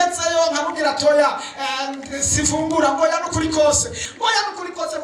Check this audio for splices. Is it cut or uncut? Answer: cut